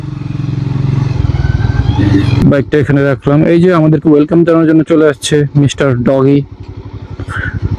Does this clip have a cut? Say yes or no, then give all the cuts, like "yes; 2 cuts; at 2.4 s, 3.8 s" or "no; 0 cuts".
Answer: yes; 1 cut; at 2.4 s